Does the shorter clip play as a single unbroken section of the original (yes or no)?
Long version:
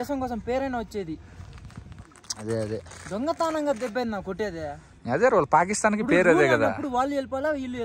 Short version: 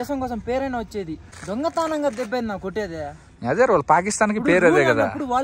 no